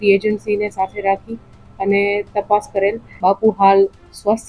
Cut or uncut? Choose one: cut